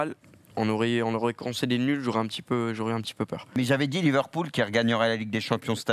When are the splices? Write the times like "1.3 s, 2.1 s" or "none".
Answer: 3.5 s